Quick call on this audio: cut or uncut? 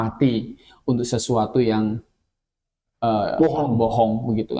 uncut